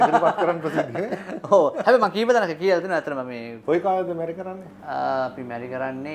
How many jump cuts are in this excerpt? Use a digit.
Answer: 0